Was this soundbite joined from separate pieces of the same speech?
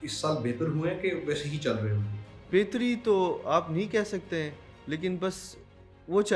yes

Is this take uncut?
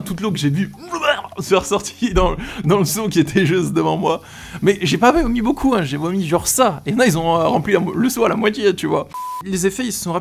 yes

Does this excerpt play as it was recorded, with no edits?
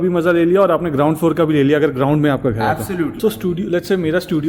no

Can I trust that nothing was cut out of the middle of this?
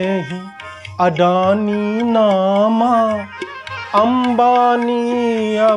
yes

